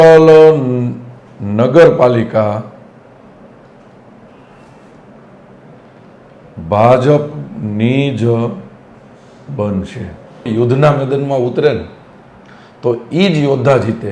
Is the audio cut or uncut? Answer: cut